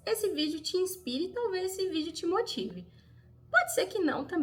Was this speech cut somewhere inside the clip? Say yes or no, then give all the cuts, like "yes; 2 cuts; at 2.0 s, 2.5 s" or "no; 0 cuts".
no; 0 cuts